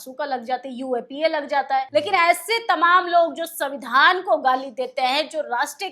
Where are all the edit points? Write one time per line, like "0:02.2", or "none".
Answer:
0:01.9